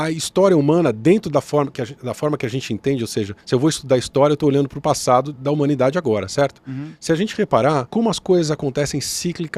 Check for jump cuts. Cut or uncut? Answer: cut